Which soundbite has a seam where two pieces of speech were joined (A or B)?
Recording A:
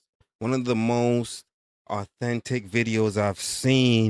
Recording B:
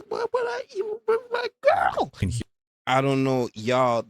B